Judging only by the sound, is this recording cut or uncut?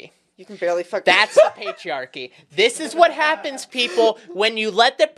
uncut